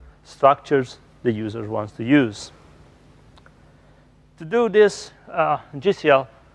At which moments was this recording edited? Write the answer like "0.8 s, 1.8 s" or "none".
none